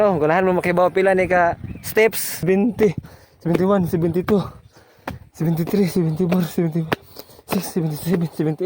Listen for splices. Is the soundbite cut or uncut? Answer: cut